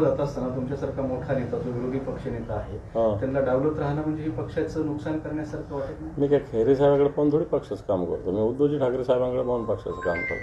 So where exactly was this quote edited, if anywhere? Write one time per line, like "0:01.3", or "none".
none